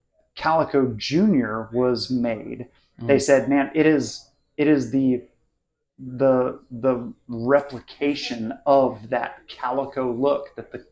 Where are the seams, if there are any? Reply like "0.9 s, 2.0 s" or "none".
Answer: none